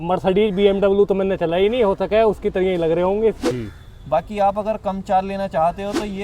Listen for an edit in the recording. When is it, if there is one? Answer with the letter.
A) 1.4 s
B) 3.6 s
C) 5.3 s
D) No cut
B